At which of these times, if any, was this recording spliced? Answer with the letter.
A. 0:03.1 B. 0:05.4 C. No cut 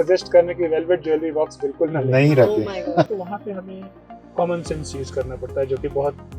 A